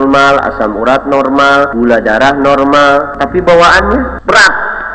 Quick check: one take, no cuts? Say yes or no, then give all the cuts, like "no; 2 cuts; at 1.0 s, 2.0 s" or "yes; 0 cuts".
no; 3 cuts; at 1.7 s, 3.2 s, 4.2 s